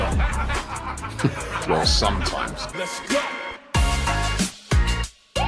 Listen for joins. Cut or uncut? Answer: cut